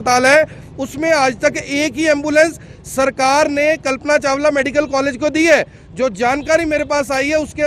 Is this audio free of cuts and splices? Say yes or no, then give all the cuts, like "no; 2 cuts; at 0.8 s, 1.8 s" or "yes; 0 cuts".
yes; 0 cuts